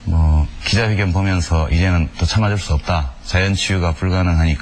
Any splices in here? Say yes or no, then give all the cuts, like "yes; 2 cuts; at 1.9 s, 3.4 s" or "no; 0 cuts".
no; 0 cuts